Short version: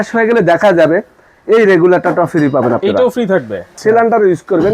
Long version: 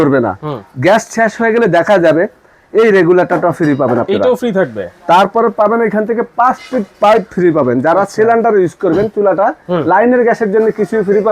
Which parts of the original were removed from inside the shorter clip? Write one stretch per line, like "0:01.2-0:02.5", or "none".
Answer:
0:05.0-0:08.1